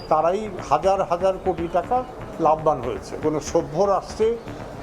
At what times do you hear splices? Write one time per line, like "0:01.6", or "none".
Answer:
0:03.2